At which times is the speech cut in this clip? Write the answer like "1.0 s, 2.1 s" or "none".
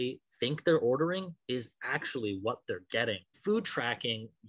3.4 s

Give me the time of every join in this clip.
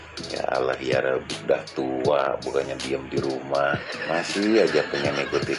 none

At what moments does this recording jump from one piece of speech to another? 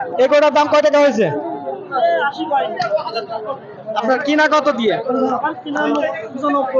none

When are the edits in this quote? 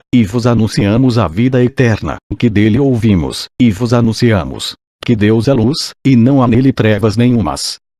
none

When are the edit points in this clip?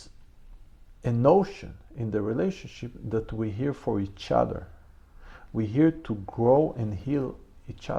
none

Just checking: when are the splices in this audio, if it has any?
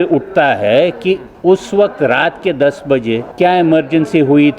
3.3 s

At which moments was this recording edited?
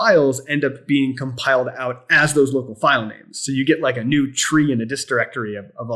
none

